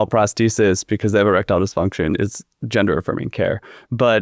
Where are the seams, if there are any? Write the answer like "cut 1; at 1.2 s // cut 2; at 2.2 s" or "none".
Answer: none